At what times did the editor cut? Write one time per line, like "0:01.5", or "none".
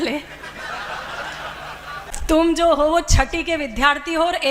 0:02.2

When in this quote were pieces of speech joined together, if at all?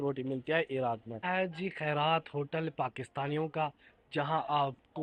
none

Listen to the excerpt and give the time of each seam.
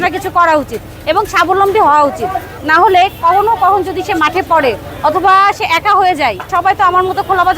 0:02.6
0:06.4

